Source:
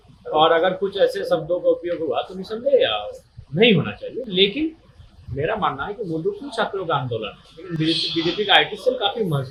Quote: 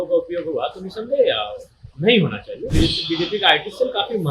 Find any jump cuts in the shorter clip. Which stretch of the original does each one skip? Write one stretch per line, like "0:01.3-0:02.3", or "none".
0:04.2-0:07.7